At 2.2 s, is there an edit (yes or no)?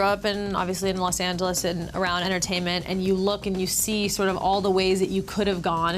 yes